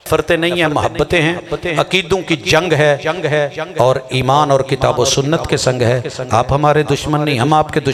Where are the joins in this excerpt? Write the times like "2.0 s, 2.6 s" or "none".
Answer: none